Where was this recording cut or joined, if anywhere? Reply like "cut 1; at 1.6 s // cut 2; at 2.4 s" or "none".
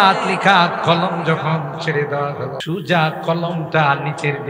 cut 1; at 2.6 s